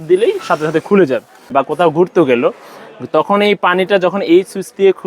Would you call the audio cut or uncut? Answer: cut